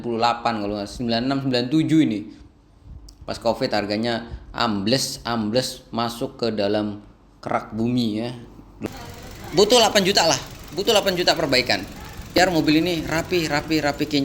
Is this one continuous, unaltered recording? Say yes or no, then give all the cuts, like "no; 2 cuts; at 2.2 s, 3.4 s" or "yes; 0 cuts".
no; 1 cut; at 8.9 s